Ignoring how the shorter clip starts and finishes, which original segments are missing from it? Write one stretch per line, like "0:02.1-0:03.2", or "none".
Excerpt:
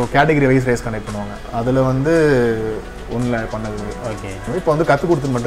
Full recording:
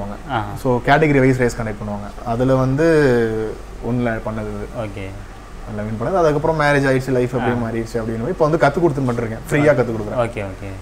0:05.2-0:08.2